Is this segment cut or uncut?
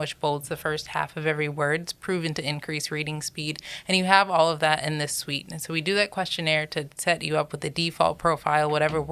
uncut